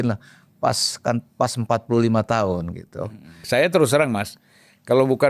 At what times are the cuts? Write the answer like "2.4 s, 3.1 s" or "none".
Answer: 3.4 s